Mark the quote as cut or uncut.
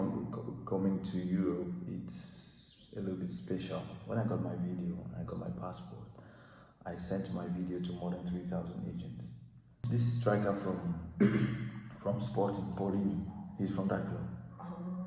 cut